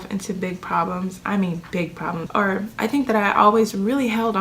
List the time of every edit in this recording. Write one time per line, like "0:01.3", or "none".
0:02.2